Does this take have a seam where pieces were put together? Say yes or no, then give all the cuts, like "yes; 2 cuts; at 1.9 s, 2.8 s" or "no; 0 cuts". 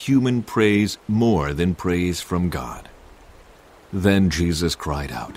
yes; 2 cuts; at 1.0 s, 3.4 s